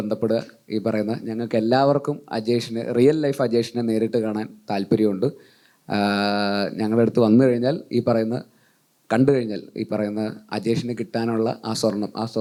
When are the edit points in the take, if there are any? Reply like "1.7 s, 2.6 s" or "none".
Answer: none